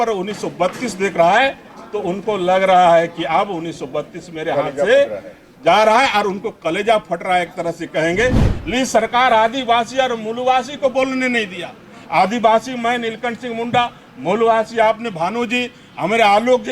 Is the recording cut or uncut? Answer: cut